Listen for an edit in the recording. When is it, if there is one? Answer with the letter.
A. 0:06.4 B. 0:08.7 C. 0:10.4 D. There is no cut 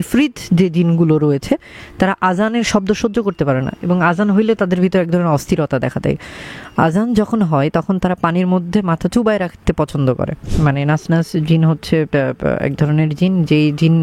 C